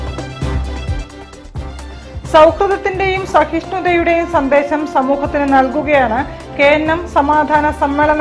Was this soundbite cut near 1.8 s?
yes; 1 cut; at 1.8 s

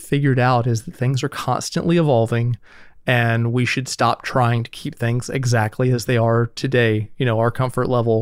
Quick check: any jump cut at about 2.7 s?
no; 0 cuts

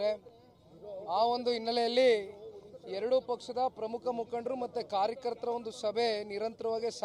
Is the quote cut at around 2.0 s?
yes; 1 cut; at 2.0 s

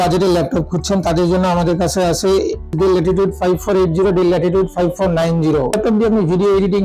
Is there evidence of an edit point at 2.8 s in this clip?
yes; 2 cuts; at 2.8 s, 5.8 s

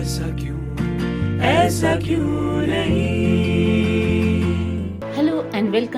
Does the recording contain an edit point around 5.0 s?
yes; 1 cut; at 5.0 s

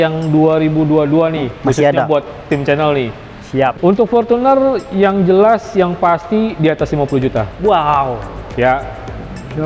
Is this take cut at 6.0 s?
no; 1 cut; at 3.7 s

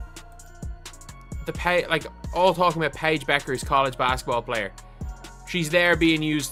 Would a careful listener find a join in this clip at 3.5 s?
no; 0 cuts

